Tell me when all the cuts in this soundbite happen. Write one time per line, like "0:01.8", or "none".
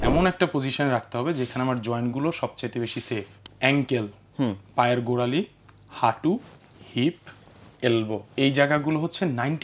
0:03.4
0:08.3